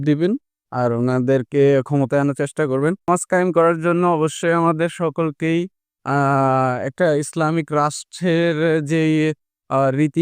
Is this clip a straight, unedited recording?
no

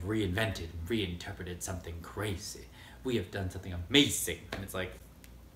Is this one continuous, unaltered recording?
yes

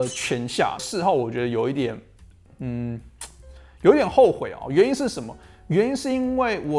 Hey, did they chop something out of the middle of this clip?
no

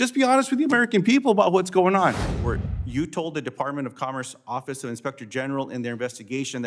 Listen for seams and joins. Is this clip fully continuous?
no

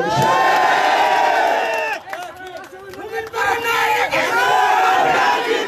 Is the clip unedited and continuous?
yes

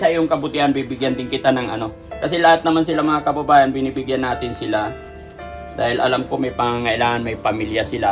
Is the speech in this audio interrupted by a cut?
no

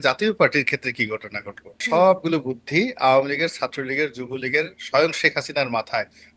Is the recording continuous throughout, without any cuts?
no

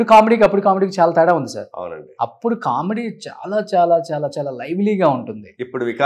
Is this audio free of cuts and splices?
yes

